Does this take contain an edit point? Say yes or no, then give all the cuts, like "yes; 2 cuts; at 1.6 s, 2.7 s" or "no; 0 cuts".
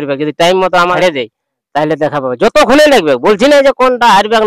yes; 1 cut; at 0.9 s